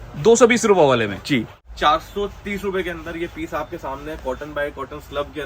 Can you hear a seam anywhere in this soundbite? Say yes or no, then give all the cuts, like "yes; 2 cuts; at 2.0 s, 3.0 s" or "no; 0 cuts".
yes; 1 cut; at 1.6 s